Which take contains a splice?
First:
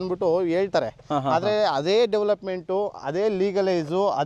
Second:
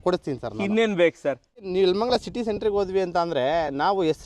second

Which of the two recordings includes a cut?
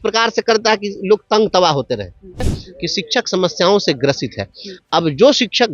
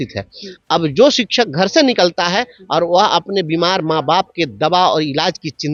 first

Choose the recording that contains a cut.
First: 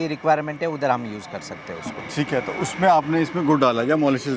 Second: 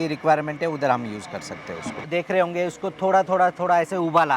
second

